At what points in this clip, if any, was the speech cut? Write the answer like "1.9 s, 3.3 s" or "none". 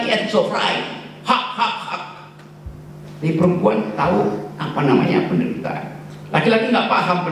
none